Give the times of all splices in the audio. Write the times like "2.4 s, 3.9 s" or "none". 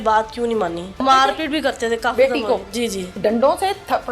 1.0 s, 3.2 s